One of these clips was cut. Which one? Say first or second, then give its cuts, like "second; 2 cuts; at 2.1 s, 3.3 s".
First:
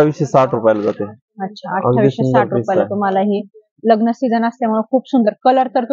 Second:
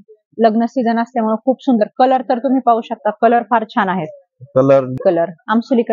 second; 1 cut; at 5.0 s